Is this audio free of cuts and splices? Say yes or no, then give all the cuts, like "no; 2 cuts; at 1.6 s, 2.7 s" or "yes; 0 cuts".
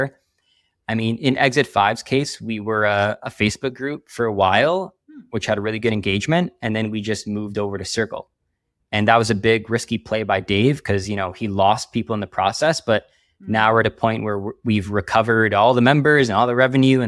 yes; 0 cuts